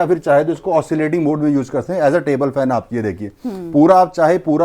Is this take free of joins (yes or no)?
yes